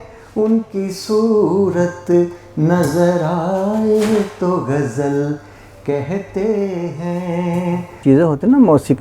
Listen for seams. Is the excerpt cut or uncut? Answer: cut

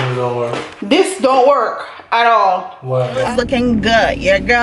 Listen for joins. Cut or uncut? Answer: cut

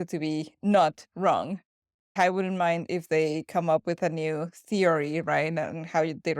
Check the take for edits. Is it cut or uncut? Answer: cut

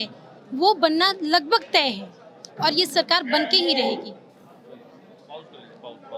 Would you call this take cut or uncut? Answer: uncut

